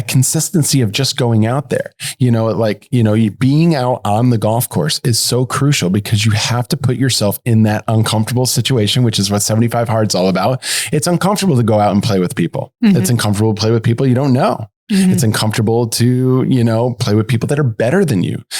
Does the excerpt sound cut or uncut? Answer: uncut